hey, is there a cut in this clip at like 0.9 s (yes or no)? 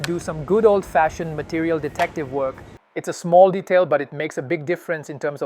no